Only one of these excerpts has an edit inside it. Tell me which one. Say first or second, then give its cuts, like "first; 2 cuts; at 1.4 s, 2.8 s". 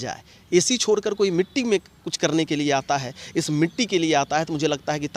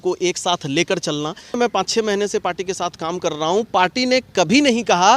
second; 1 cut; at 1.6 s